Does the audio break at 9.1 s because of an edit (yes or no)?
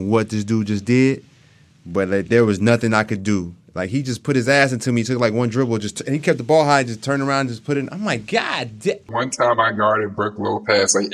yes